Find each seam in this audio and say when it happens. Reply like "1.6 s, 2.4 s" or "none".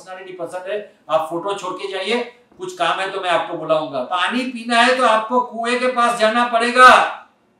4.1 s

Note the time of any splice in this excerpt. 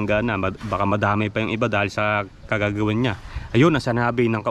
none

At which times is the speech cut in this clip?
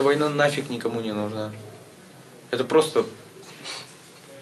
2.4 s

